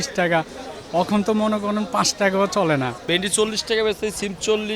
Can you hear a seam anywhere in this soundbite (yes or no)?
yes